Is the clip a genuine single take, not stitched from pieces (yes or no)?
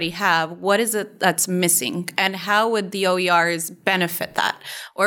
yes